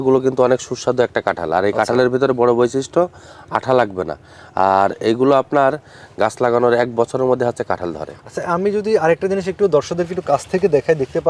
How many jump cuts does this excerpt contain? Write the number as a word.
zero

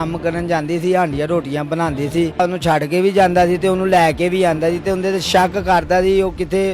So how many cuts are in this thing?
zero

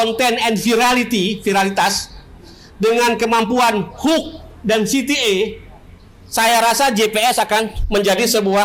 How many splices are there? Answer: zero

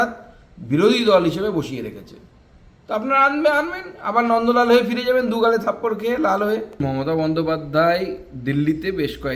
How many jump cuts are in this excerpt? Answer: one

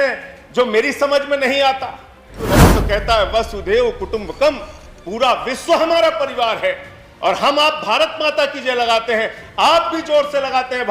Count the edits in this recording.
one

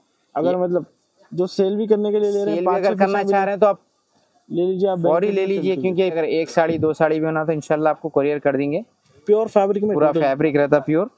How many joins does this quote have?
one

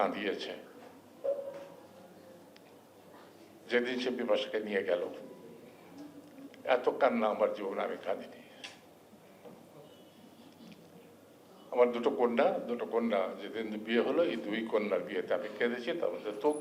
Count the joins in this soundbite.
zero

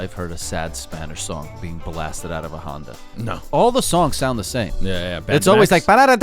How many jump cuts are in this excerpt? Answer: one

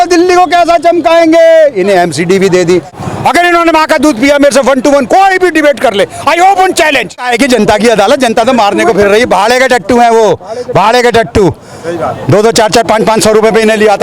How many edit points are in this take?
two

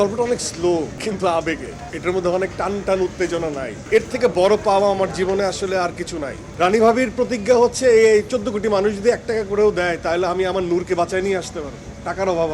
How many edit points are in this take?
two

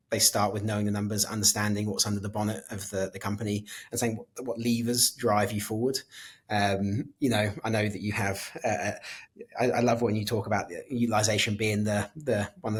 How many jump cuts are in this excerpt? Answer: zero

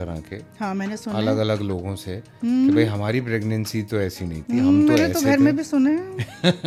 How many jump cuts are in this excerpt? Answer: zero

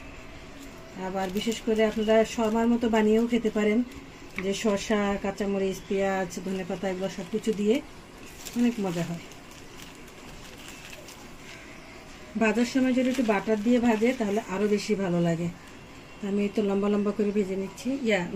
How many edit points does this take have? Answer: zero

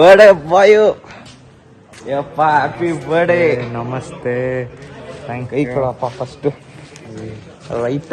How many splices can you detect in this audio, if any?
zero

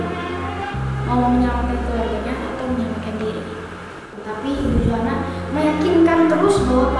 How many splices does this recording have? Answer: one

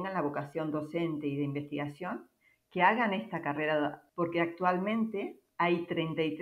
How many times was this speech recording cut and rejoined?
one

